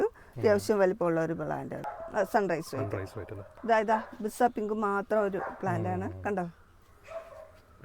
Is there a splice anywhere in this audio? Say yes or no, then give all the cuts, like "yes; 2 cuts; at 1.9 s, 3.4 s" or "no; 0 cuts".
yes; 2 cuts; at 1.9 s, 3.5 s